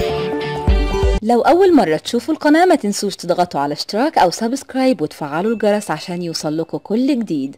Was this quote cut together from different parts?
yes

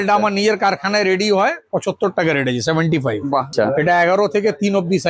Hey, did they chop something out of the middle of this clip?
yes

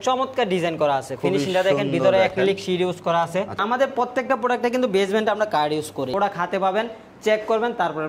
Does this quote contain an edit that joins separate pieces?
yes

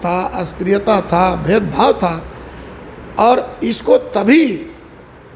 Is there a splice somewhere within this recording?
no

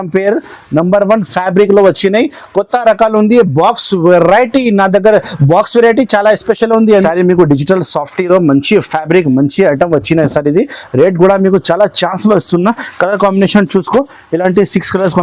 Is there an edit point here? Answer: yes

